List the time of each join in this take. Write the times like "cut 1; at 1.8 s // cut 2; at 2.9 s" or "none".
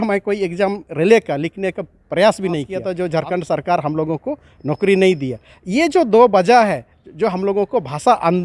cut 1; at 2.8 s